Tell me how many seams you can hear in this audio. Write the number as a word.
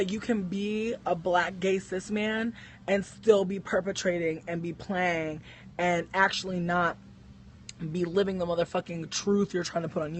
one